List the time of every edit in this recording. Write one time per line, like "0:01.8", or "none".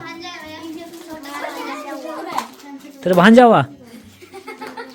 none